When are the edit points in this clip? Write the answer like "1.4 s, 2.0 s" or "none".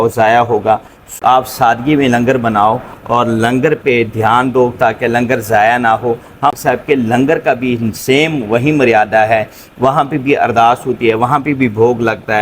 1.2 s, 6.6 s